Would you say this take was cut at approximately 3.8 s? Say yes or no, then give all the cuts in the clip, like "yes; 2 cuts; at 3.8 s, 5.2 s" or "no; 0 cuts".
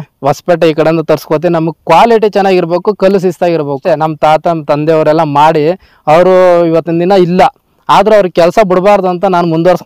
yes; 1 cut; at 3.8 s